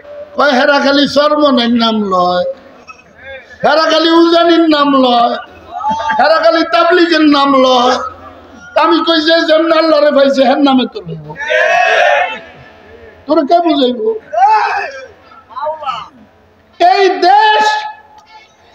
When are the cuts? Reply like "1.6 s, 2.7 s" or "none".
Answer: none